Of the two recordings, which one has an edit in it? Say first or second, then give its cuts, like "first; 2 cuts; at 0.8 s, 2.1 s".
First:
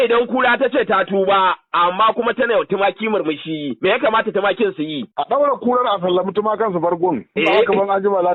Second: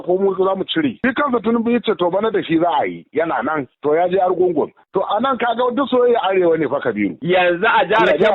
second; 2 cuts; at 1.0 s, 7.2 s